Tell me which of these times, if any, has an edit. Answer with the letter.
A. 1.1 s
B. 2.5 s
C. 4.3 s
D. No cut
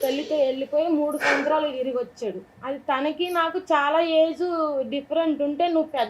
B